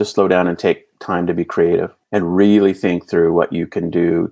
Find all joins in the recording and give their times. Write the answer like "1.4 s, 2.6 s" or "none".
2.0 s